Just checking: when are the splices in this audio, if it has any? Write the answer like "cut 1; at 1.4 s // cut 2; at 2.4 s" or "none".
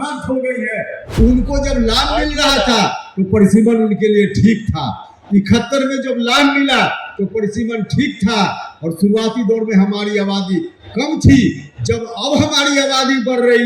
cut 1; at 1.0 s